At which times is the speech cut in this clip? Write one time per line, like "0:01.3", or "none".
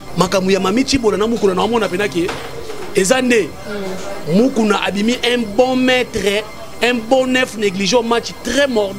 none